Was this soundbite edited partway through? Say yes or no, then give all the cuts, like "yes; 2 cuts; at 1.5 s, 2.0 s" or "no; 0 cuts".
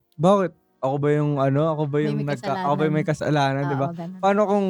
no; 0 cuts